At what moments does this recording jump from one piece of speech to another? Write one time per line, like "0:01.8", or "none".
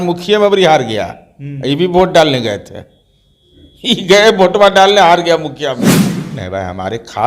0:05.8